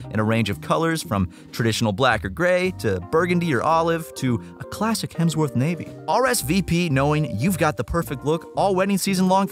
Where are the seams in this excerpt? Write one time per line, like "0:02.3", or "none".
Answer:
0:06.0